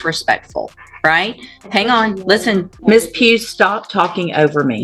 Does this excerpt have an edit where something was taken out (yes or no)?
yes